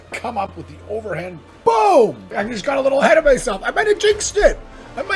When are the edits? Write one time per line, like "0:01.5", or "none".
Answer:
0:02.3